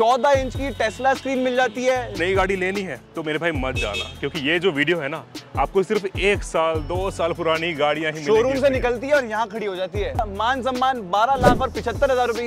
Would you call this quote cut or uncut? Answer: cut